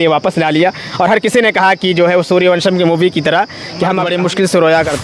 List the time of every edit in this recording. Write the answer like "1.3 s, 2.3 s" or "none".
4.0 s